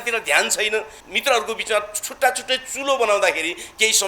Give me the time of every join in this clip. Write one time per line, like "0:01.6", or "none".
0:01.0